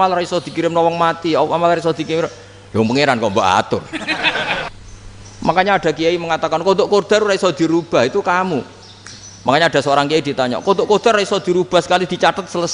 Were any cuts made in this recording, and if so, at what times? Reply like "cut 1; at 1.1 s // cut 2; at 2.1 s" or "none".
cut 1; at 4.7 s

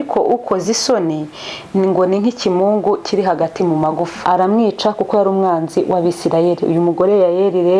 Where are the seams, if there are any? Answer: cut 1; at 4.1 s

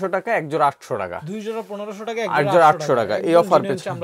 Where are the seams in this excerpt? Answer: none

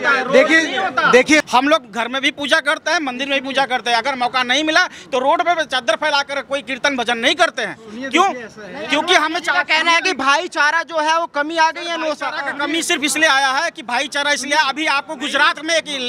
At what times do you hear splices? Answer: cut 1; at 1.5 s

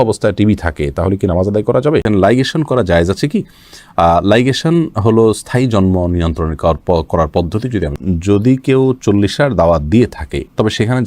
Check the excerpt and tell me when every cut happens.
cut 1; at 2.0 s // cut 2; at 8.0 s

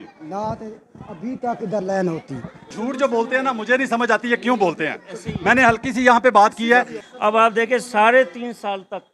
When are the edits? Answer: cut 1; at 2.7 s // cut 2; at 7.0 s

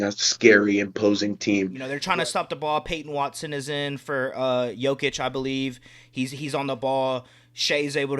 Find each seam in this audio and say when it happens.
cut 1; at 1.9 s

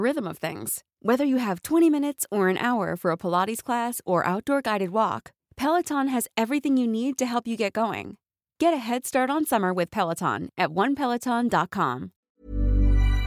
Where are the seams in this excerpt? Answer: cut 1; at 12.3 s

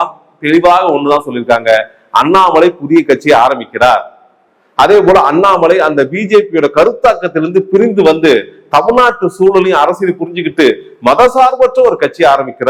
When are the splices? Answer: none

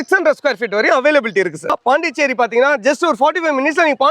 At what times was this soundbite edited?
cut 1; at 1.6 s

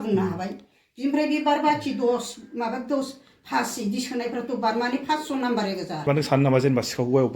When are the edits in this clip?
cut 1; at 6.0 s

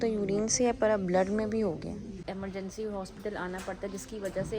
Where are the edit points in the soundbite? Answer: cut 1; at 2.2 s

